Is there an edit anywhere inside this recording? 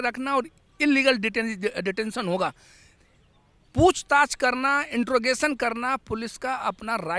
no; 0 cuts

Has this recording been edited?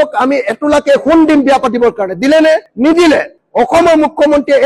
no; 0 cuts

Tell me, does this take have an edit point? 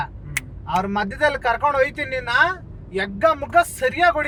no; 0 cuts

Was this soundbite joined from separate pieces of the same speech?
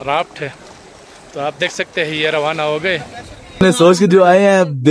yes; 1 cut; at 3.6 s

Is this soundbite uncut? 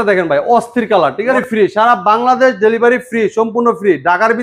no; 1 cut; at 1.4 s

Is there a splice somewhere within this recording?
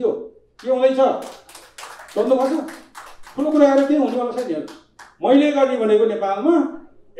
no; 0 cuts

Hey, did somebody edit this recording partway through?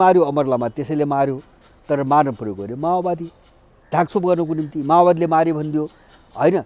no; 0 cuts

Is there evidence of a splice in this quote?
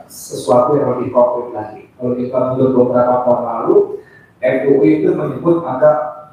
no; 0 cuts

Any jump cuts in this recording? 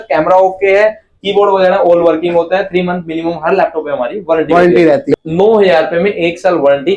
yes; 1 cut; at 5.1 s

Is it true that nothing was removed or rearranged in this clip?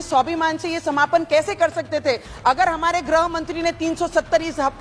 yes; 0 cuts

